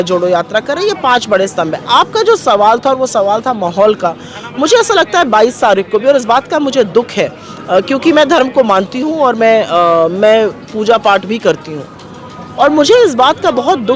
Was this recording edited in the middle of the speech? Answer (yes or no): no